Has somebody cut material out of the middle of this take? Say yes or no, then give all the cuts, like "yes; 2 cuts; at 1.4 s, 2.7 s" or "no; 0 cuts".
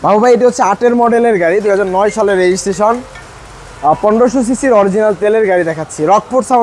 no; 0 cuts